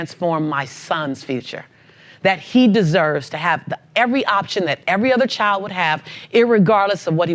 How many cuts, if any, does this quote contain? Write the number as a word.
zero